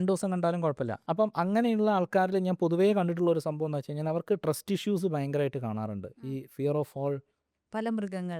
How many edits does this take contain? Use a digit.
2